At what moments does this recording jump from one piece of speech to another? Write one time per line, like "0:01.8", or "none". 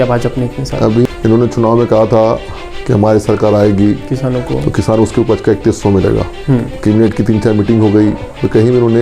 0:01.0
0:06.7